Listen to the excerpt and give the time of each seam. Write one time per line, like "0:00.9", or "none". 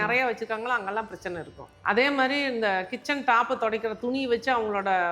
0:01.7